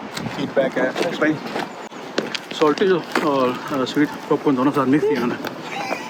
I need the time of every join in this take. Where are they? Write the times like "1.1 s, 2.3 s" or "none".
none